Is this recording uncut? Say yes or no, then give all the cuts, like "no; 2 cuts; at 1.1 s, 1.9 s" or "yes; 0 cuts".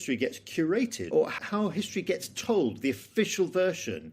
no; 1 cut; at 1.3 s